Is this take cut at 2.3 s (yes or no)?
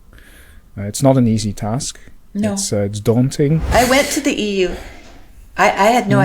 no